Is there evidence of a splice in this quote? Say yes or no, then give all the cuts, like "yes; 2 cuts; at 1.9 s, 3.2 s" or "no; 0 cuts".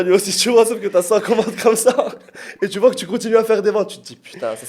no; 0 cuts